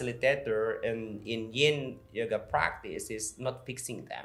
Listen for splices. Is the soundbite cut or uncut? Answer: uncut